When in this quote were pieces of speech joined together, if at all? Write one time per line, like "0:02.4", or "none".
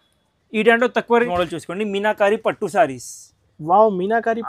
0:01.3